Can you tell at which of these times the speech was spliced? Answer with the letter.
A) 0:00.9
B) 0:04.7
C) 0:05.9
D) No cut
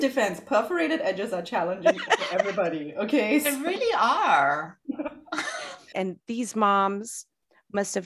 C